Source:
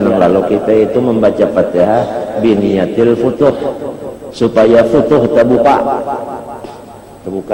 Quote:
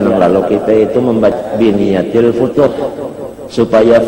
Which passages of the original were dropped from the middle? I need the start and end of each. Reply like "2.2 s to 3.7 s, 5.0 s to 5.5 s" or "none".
1.3 s to 2.2 s